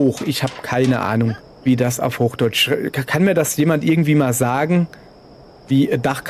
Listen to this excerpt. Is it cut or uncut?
cut